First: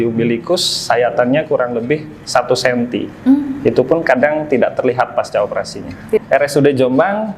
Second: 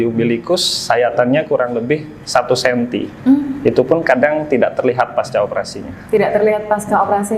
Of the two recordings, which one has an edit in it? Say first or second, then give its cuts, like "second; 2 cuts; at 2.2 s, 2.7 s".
first; 1 cut; at 6.2 s